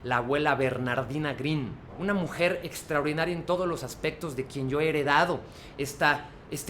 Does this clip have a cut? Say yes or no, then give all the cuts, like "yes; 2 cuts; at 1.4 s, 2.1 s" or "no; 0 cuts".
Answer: yes; 1 cut; at 1.8 s